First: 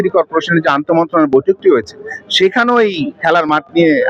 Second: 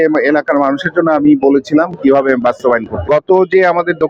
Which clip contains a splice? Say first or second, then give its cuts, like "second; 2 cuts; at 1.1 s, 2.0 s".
second; 1 cut; at 2.9 s